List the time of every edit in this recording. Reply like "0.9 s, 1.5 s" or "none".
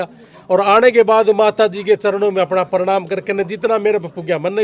none